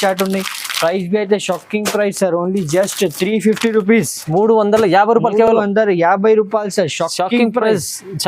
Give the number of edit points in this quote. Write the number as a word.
zero